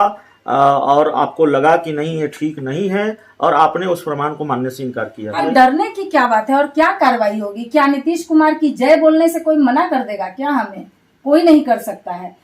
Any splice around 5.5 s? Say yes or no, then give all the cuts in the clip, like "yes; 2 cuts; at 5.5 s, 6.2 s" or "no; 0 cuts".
yes; 1 cut; at 5.5 s